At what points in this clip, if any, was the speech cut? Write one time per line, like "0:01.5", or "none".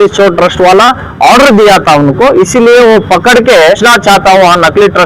0:03.8